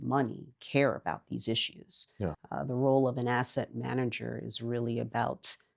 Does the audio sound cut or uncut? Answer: cut